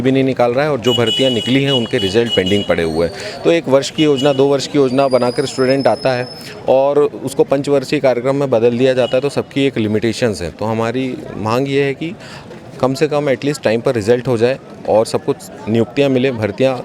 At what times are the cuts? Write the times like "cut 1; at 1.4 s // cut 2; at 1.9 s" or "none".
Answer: none